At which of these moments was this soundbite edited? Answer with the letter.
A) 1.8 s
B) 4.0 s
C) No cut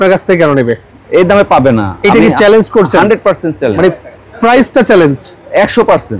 C